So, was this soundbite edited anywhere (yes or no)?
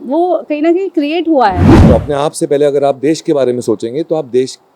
yes